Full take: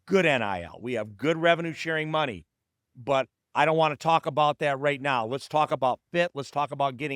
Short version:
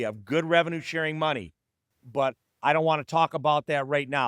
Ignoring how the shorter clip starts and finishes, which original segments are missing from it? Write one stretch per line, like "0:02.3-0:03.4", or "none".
none